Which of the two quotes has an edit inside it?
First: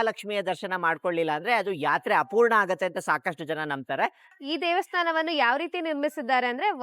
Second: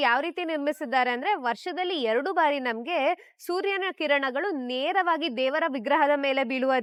first; 1 cut; at 4.4 s

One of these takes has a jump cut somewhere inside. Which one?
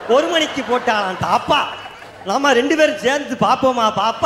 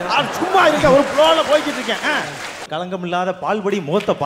second; 1 cut; at 2.7 s

